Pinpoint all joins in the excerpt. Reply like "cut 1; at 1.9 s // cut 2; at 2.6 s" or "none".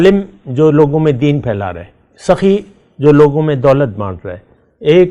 none